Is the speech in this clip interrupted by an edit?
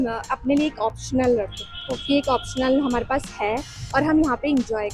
no; 0 cuts

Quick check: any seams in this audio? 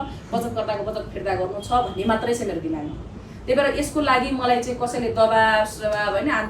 no; 0 cuts

